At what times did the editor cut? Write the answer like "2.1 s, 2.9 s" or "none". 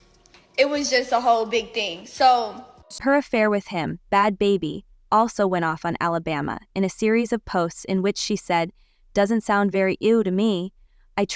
2.9 s